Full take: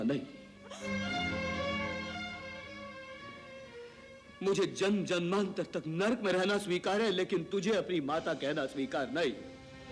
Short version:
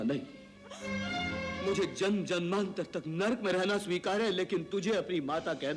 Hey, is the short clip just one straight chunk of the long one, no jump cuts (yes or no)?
no